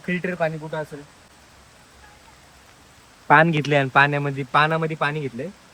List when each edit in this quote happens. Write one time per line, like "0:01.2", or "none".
0:01.3